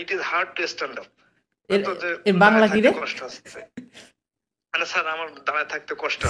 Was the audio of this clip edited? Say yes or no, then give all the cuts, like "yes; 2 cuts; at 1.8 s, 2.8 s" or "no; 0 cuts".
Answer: no; 0 cuts